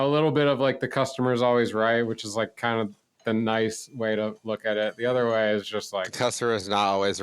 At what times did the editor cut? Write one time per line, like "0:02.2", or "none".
0:03.2
0:04.4